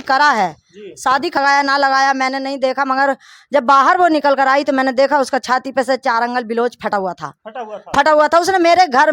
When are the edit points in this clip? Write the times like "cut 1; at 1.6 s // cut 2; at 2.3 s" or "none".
cut 1; at 1.4 s